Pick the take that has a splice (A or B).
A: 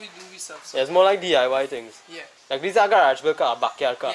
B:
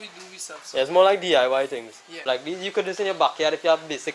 B